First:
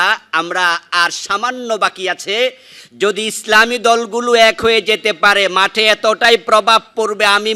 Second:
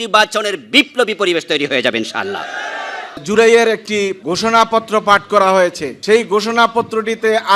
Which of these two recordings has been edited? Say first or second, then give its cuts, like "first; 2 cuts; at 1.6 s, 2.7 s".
second; 3 cuts; at 3.2 s, 4.2 s, 5.9 s